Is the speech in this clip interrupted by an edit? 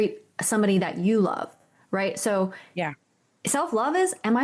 no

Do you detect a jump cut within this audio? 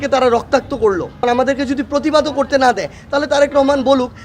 yes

